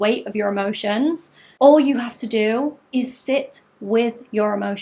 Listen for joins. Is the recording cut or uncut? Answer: uncut